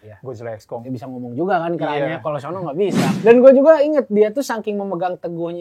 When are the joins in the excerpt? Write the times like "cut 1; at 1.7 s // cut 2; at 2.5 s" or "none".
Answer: cut 1; at 3.1 s

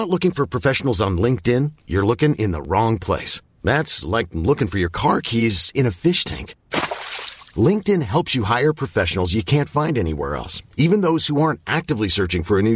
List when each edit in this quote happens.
none

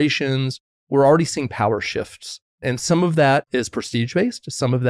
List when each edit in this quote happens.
cut 1; at 0.9 s // cut 2; at 2.5 s // cut 3; at 3.5 s

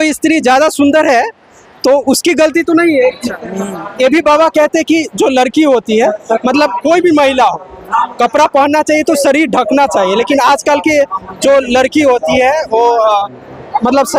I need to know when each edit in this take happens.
cut 1; at 3.0 s

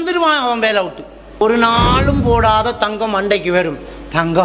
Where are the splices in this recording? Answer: cut 1; at 1.4 s

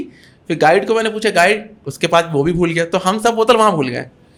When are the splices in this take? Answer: none

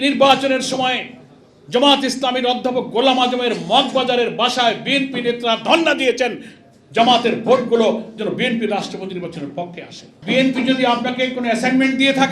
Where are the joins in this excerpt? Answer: cut 1; at 10.1 s

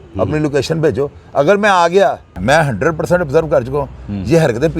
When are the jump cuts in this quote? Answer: cut 1; at 2.3 s

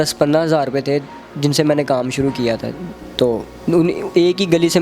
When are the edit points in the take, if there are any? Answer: none

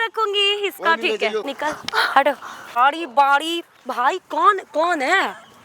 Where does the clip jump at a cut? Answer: cut 1; at 1.5 s // cut 2; at 2.8 s

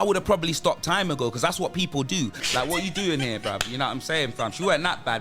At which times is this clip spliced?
cut 1; at 2.4 s

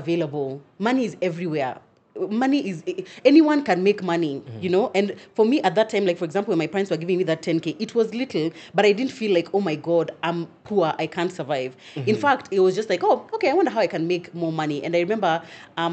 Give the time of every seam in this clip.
none

